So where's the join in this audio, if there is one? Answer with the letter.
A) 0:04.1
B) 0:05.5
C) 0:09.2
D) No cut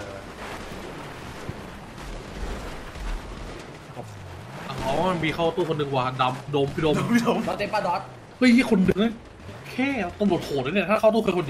A